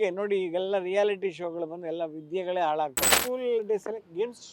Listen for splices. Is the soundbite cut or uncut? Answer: cut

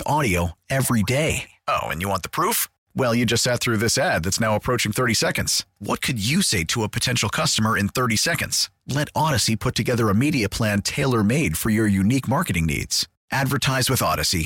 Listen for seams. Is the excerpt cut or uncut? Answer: uncut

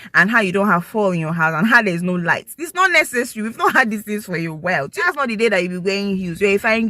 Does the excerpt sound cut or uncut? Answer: cut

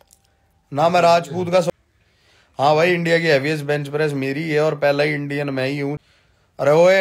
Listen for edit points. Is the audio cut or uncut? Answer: cut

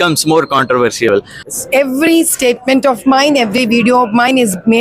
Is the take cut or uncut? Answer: cut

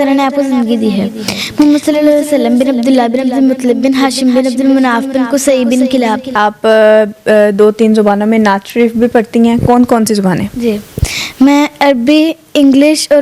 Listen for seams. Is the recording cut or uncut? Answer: cut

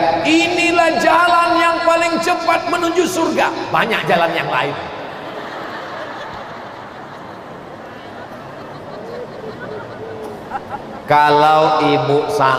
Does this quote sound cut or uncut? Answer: uncut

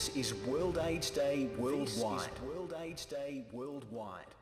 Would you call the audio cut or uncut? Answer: uncut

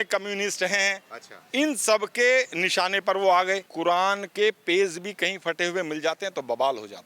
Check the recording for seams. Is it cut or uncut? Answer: cut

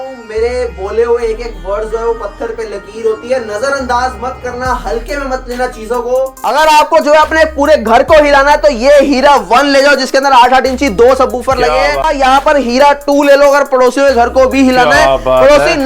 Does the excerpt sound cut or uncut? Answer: cut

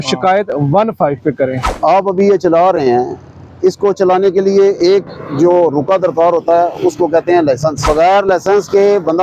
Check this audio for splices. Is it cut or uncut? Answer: cut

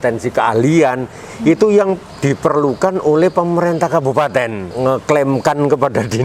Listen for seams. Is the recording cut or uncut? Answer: cut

